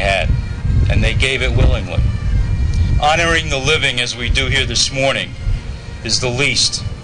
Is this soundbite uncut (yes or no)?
no